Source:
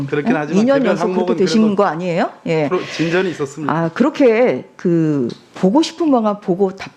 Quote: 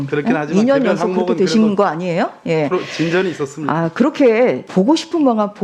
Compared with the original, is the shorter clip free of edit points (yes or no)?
no